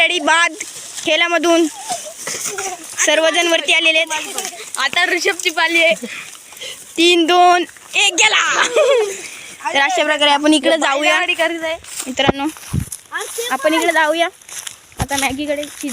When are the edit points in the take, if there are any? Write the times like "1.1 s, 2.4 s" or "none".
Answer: 9.1 s